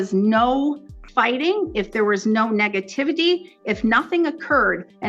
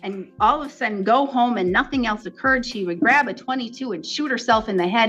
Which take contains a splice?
first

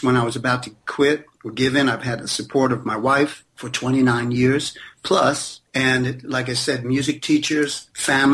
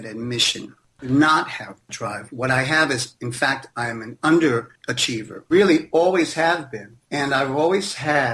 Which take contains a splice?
second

